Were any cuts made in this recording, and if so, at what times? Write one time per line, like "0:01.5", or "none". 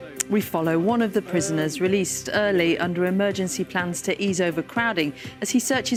none